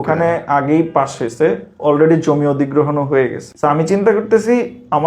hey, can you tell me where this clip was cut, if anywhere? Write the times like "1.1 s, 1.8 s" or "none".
3.4 s